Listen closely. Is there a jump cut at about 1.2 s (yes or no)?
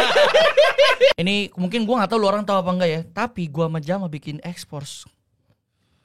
yes